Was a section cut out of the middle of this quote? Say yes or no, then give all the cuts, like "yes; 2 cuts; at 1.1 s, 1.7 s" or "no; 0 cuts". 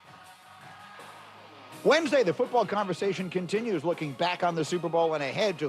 yes; 1 cut; at 1.8 s